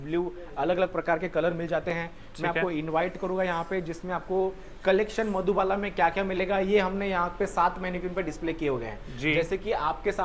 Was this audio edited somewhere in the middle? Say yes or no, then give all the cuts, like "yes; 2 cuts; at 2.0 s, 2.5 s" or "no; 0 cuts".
no; 0 cuts